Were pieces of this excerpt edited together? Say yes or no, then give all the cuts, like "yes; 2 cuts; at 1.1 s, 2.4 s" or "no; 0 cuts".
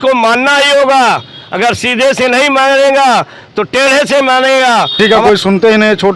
yes; 1 cut; at 5.0 s